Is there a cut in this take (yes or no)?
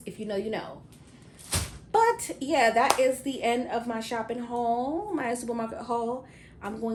no